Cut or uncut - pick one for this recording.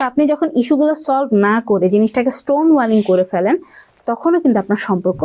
uncut